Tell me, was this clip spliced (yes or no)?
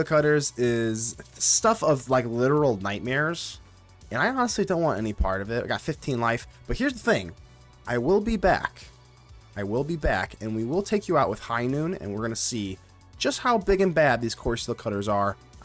no